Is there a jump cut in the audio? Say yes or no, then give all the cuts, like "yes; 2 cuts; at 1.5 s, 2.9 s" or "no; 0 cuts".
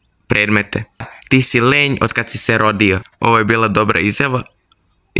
yes; 2 cuts; at 1.0 s, 3.1 s